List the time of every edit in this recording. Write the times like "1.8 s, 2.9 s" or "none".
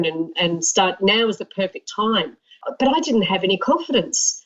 2.4 s

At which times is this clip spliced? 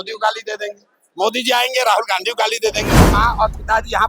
3.0 s

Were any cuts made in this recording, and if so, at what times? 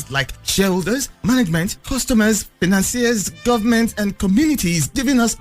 2.5 s

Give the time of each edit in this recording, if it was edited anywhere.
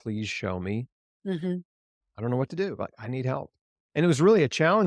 3.8 s

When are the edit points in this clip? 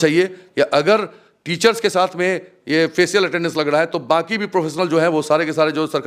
none

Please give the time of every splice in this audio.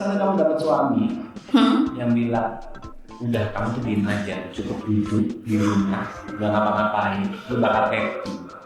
none

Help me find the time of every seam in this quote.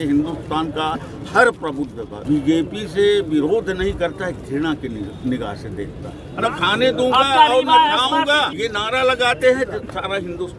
2.1 s, 6.2 s, 8.5 s

